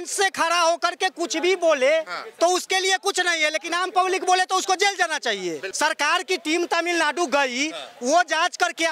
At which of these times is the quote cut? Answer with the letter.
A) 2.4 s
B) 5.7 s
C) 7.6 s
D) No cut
B